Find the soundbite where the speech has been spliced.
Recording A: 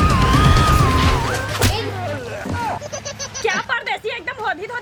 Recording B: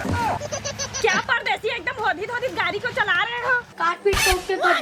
B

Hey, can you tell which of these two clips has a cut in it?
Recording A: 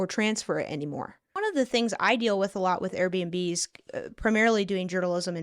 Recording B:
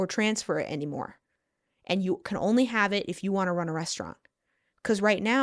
A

